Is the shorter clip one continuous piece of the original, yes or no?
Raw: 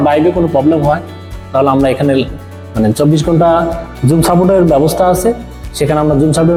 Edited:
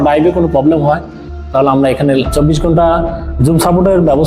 no